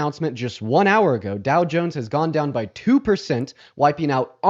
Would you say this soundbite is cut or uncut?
uncut